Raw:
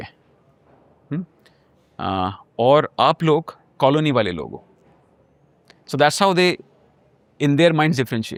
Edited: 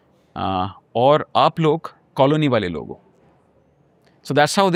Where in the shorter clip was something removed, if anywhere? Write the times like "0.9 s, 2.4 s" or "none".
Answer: none